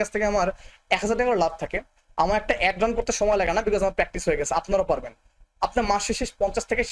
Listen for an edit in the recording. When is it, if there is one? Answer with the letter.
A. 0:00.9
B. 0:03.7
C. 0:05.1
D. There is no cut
D